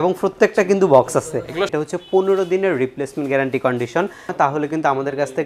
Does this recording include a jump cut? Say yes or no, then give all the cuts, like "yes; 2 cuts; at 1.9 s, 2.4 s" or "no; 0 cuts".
yes; 2 cuts; at 1.7 s, 4.3 s